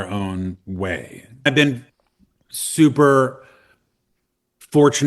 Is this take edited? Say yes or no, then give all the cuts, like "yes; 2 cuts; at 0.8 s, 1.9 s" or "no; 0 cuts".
yes; 1 cut; at 1.5 s